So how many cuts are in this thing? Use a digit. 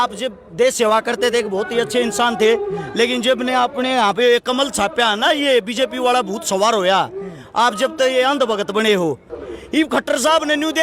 1